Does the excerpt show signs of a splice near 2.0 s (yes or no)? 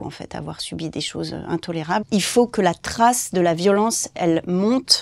yes